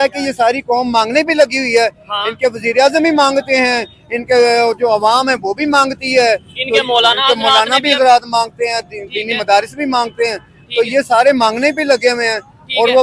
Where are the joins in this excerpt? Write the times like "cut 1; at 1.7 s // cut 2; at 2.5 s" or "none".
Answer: none